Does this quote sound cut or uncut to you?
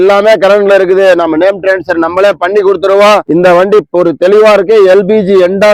uncut